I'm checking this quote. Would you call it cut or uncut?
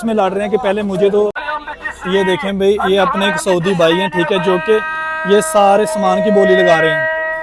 cut